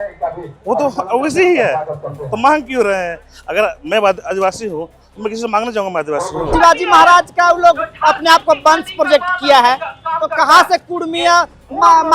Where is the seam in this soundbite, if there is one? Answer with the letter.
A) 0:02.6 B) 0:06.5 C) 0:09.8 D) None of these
B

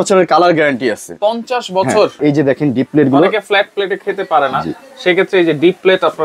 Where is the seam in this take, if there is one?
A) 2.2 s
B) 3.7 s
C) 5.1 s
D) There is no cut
A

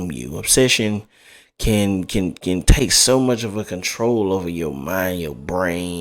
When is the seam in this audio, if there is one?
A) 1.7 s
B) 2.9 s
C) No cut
C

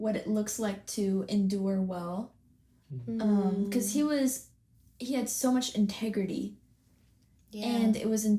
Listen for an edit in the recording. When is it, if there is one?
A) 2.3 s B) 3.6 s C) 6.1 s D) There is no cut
D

